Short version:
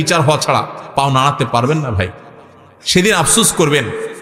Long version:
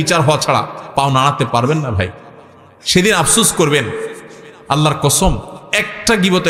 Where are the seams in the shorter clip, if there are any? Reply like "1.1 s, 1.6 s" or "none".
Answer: none